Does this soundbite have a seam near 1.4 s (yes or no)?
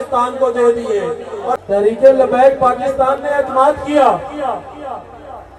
yes